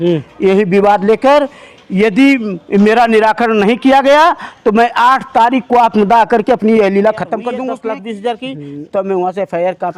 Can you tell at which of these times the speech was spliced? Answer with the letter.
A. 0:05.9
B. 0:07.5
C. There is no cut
B